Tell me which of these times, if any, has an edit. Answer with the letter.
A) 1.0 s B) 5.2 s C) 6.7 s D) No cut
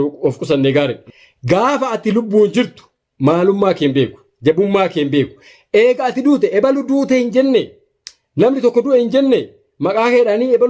A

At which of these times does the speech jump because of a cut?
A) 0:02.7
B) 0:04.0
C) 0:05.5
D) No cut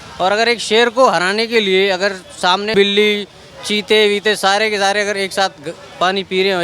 A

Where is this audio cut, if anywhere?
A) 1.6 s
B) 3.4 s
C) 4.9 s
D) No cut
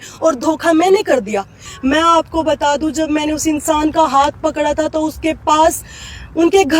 A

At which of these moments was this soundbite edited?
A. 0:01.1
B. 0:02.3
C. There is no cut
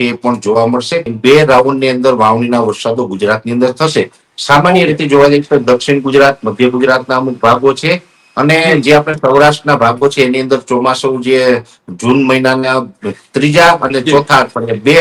A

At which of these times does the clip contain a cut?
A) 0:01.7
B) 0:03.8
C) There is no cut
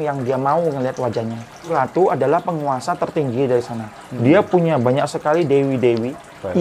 A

